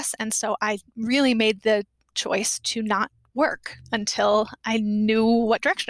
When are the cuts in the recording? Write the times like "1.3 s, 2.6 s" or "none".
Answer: none